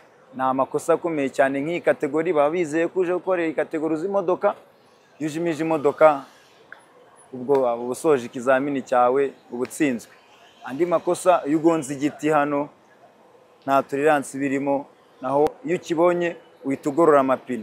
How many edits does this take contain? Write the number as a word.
one